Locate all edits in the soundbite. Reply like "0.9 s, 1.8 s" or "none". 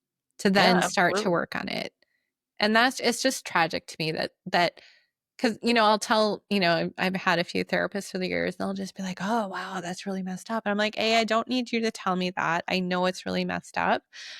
6.4 s